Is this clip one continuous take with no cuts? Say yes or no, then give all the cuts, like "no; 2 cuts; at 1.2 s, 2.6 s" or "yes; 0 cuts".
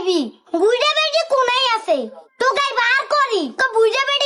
yes; 0 cuts